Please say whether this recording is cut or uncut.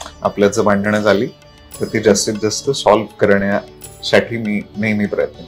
uncut